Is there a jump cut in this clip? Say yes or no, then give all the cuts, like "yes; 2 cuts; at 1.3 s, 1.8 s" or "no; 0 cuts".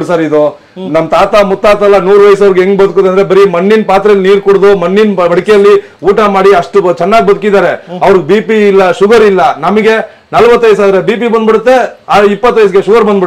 no; 0 cuts